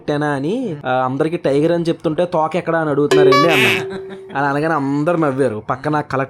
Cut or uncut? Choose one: uncut